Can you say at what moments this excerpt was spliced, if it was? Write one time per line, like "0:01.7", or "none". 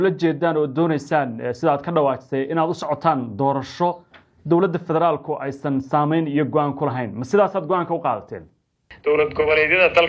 0:08.8